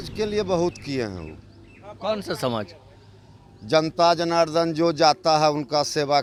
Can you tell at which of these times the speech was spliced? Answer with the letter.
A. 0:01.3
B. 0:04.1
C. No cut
C